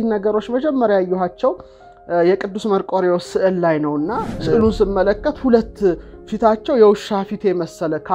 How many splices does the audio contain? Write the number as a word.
one